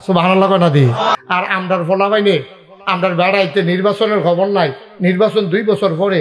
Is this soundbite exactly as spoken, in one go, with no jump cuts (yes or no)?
no